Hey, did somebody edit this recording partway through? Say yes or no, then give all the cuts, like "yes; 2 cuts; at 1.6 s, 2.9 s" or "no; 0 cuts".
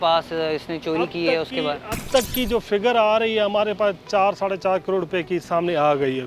no; 0 cuts